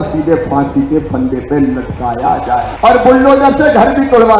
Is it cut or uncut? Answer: cut